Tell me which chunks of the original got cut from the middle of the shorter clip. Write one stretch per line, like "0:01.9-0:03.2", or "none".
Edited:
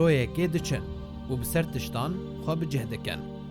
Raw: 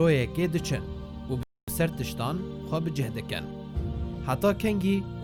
0:01.4-0:01.7